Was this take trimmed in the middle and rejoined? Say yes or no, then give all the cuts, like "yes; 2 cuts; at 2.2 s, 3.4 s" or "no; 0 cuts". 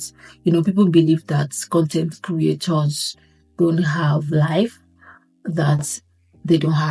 no; 0 cuts